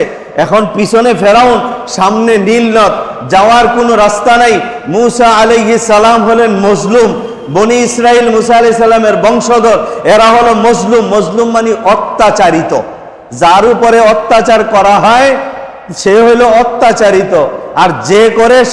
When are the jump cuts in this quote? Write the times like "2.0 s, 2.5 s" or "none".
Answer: none